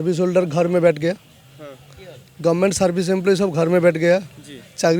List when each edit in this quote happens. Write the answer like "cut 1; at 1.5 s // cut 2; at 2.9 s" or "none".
none